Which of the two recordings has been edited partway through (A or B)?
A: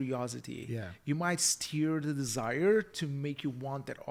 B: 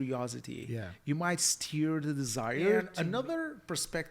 B